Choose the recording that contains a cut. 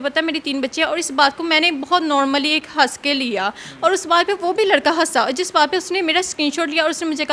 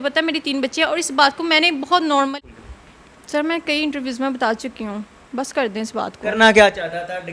second; 1 cut; at 2.3 s

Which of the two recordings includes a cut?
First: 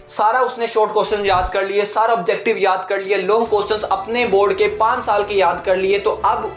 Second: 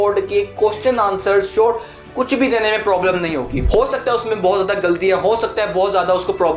second; 1 cut; at 3.6 s

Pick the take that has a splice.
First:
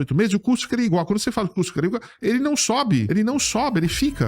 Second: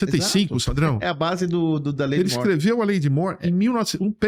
first; 1 cut; at 3.1 s

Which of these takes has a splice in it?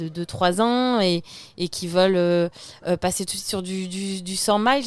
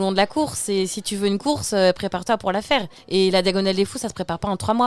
second; 1 cut; at 3.0 s

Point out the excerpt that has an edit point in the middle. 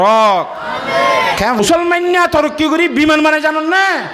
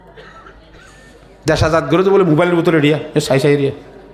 first; 1 cut; at 1.6 s

